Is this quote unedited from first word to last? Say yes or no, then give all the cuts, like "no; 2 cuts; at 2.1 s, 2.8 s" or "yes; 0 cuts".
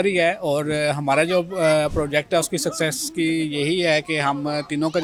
yes; 0 cuts